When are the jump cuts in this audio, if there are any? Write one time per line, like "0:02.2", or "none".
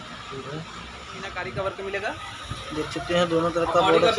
0:01.4